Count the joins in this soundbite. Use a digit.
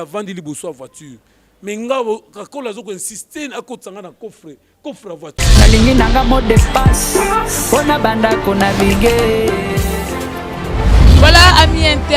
1